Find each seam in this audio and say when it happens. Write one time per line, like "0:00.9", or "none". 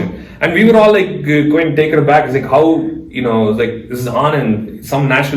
none